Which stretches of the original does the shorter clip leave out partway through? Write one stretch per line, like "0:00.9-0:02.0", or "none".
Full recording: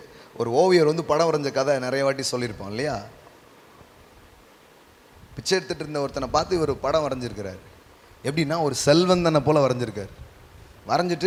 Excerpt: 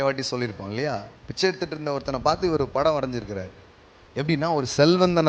0:03.2-0:05.3